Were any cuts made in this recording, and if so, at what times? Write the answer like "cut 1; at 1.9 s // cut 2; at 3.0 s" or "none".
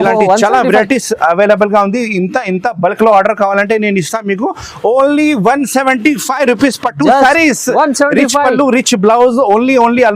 none